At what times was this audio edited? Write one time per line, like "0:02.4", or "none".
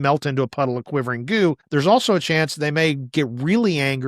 0:01.6